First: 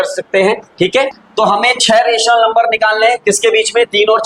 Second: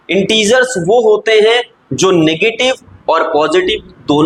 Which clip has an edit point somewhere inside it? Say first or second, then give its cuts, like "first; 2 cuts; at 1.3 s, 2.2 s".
first; 1 cut; at 1.2 s